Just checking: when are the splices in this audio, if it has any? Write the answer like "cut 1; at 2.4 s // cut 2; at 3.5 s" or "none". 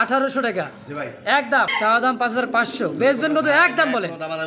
cut 1; at 1.7 s

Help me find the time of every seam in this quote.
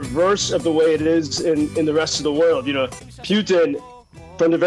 cut 1; at 3.1 s

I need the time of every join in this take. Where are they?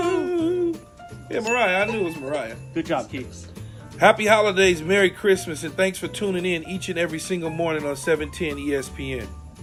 none

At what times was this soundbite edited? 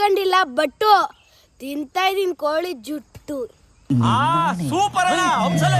cut 1; at 3.7 s

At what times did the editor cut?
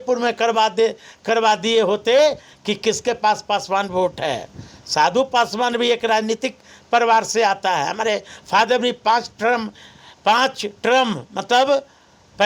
none

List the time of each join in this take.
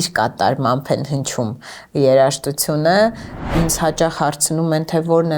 cut 1; at 3.5 s

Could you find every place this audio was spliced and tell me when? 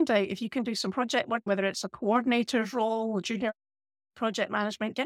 cut 1; at 1.5 s

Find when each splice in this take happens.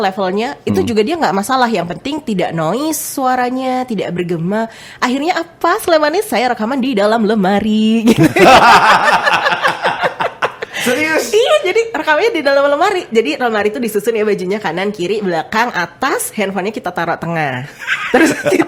none

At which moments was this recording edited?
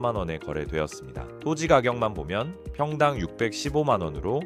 none

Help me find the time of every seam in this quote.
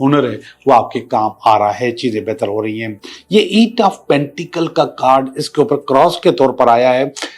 none

